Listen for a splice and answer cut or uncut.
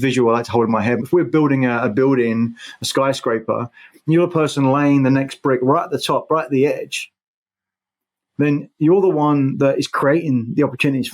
cut